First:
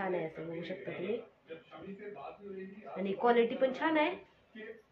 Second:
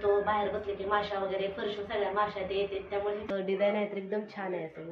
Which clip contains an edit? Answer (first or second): second